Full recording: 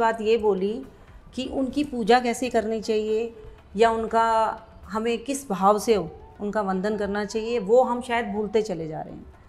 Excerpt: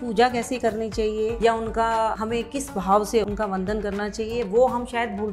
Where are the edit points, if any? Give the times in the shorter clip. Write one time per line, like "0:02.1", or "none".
0:01.3
0:02.2
0:03.3